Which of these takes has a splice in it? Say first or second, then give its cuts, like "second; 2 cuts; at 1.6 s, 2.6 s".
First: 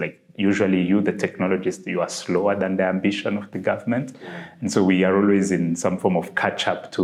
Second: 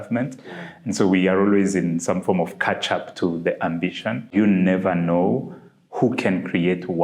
second; 1 cut; at 4.3 s